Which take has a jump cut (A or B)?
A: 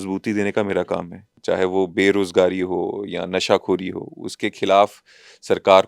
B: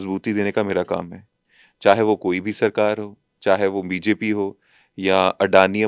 A